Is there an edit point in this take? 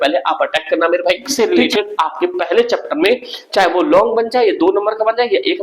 yes; 1 cut; at 1.3 s

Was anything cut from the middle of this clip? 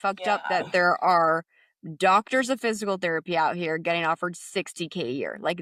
no; 0 cuts

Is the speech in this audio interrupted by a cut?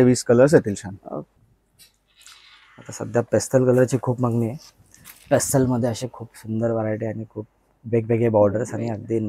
yes; 1 cut; at 1.4 s

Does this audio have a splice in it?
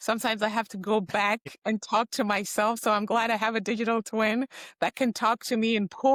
no; 0 cuts

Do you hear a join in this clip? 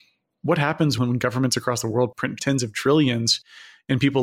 yes; 2 cuts; at 1.0 s, 2.4 s

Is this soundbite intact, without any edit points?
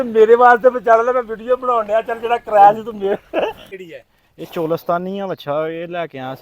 no; 1 cut; at 3.8 s

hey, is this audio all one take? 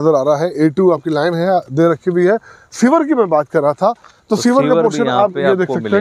yes; 0 cuts

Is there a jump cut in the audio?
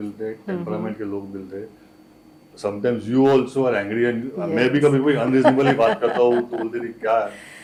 no; 0 cuts

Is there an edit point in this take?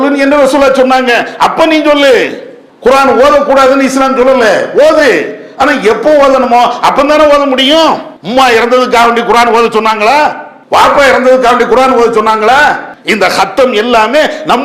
yes; 2 cuts; at 8.1 s, 12.9 s

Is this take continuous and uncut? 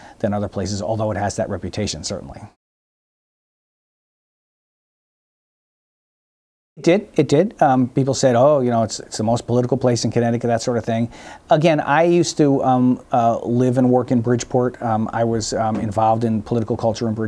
yes; 0 cuts

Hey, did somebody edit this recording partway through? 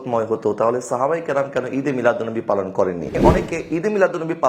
yes; 1 cut; at 3.2 s

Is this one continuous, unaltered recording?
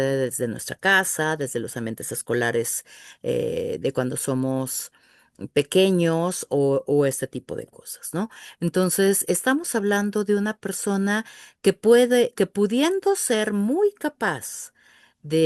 yes; 0 cuts

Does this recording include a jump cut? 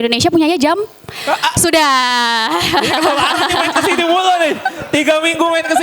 no; 0 cuts

